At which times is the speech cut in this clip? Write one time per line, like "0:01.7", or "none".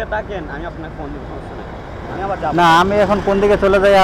none